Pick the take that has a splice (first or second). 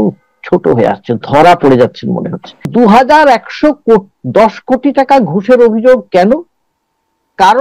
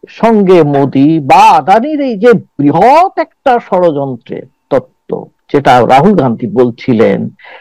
first